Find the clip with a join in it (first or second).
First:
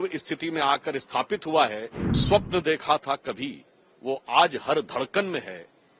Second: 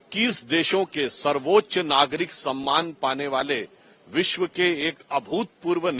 first